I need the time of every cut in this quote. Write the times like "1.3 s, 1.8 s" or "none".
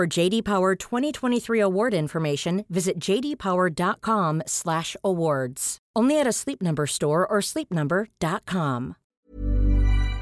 9.0 s